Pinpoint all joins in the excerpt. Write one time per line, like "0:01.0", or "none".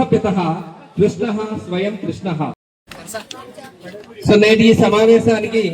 0:02.7